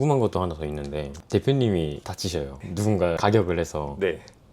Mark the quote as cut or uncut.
cut